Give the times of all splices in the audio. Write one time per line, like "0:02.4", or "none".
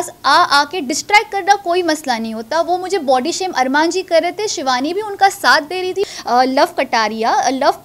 0:06.1